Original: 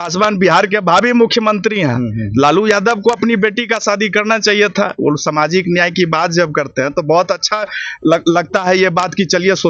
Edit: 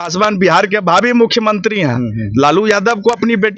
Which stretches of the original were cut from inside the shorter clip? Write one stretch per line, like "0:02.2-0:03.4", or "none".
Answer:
none

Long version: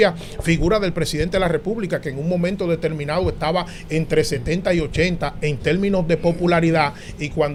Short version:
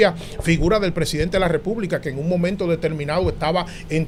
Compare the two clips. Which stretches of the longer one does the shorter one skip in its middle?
none

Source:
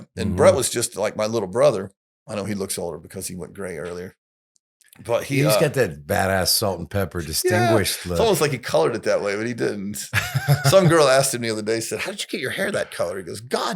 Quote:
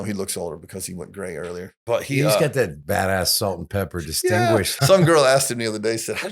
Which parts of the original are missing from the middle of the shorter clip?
0:04.2-0:05.0
0:08.0-0:10.6

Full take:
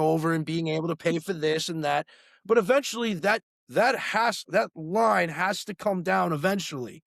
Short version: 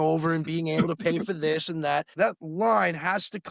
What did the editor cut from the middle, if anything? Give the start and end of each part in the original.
0:02.1-0:04.4

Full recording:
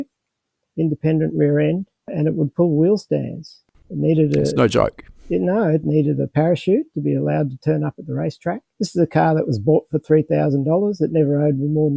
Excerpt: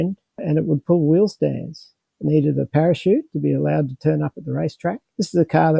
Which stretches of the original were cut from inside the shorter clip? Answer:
0:03.9-0:05.8

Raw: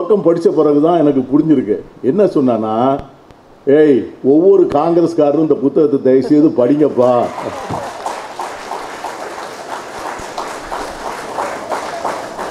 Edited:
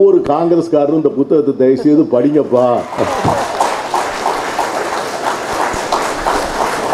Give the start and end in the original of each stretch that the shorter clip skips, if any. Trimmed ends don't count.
none

